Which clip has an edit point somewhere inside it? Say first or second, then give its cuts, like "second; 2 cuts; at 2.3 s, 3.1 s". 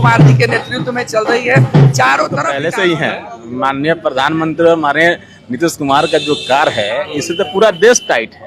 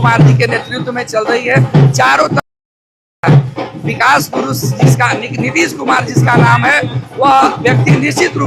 first; 1 cut; at 2.5 s